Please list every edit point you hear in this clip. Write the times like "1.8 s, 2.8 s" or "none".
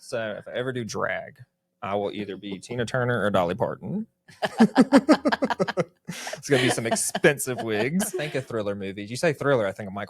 8.3 s